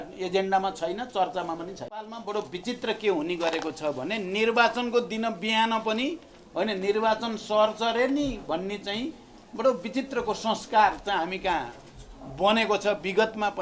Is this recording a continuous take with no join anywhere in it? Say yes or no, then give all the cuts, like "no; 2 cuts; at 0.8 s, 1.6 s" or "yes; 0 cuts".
no; 1 cut; at 2.1 s